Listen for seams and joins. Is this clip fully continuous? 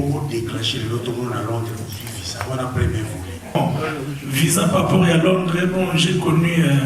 no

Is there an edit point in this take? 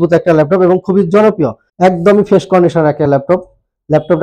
yes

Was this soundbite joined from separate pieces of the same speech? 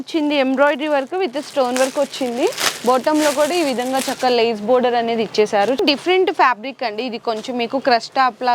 yes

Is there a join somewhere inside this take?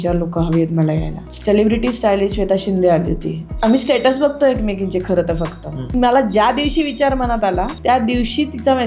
yes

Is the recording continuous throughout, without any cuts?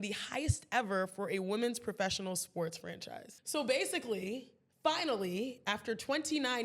no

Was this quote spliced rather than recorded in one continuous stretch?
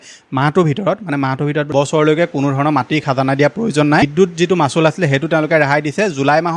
yes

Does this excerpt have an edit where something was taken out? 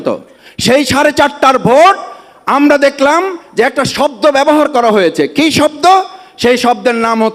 no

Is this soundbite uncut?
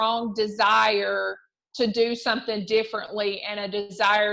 yes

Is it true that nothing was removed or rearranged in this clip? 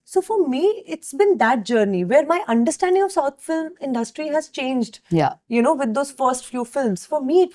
yes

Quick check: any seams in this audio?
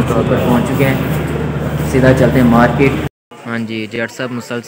yes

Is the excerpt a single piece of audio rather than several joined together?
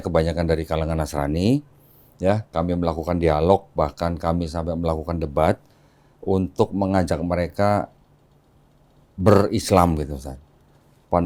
yes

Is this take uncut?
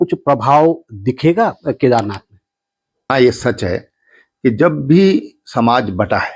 no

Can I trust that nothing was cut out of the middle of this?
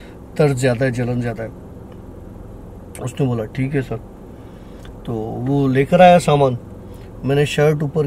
yes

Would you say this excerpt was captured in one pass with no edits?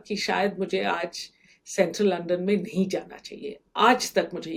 yes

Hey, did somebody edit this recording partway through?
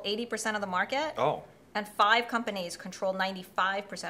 no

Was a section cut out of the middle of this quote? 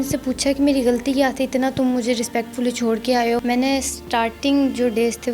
yes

